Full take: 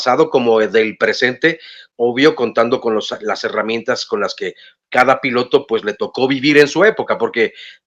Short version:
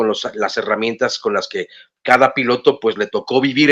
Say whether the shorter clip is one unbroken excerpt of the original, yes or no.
yes